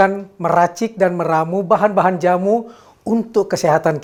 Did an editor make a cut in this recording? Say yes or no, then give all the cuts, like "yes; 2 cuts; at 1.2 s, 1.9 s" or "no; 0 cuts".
no; 0 cuts